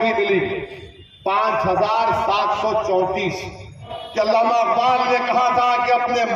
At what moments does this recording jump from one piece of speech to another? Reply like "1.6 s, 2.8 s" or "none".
4.0 s